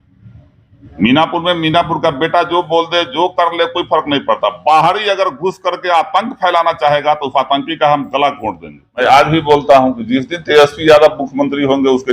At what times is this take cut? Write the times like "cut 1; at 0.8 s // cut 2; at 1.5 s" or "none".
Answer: cut 1; at 9.0 s